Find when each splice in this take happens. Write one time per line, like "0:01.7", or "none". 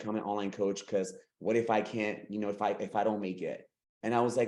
none